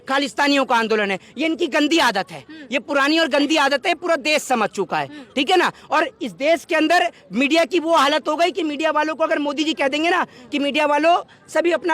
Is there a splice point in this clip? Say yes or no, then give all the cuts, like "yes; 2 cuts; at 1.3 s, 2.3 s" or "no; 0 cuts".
no; 0 cuts